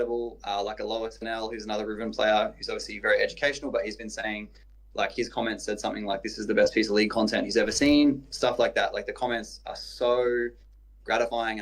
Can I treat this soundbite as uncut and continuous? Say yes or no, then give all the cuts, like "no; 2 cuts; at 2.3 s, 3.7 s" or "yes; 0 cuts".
yes; 0 cuts